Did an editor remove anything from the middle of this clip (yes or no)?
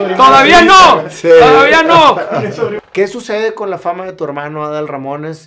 yes